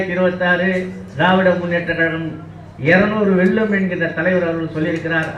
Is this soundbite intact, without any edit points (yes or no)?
yes